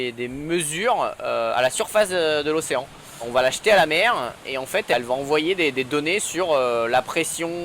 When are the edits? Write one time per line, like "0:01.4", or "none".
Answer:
0:03.3
0:04.9